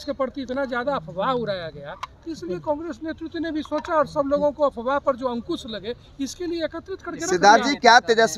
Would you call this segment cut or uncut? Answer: uncut